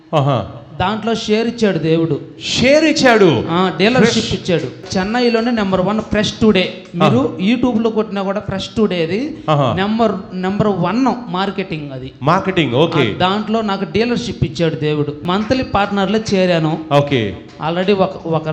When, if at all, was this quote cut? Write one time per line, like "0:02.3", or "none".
0:04.8
0:15.2

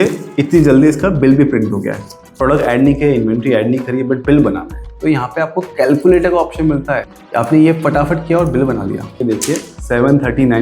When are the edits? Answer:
0:02.5
0:07.0
0:09.2

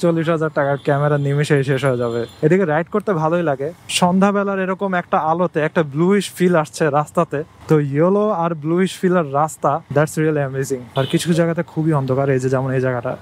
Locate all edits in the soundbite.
0:02.3
0:10.9

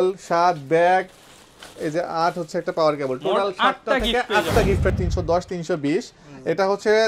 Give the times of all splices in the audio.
0:04.9

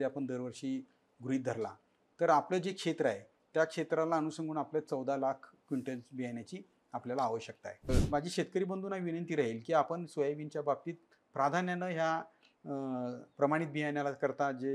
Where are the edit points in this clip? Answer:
0:07.9

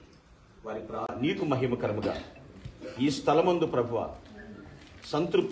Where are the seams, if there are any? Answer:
none

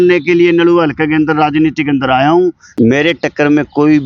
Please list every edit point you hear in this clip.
0:02.6

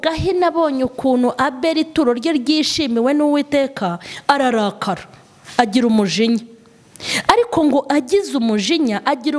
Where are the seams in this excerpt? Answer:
none

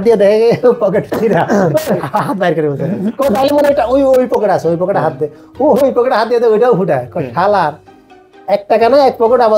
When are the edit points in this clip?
none

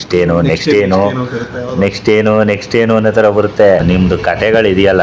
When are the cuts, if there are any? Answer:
0:03.8

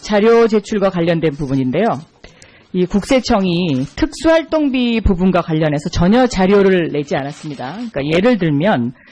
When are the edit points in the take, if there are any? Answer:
0:01.0

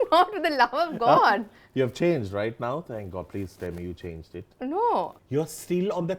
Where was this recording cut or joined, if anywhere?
0:05.2

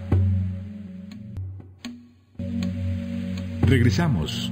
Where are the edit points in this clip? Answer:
0:01.1

